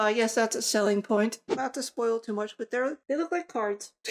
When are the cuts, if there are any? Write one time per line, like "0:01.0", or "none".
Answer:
0:01.5
0:03.0